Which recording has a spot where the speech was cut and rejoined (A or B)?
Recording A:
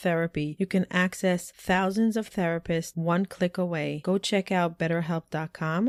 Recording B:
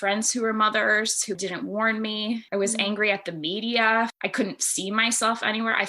B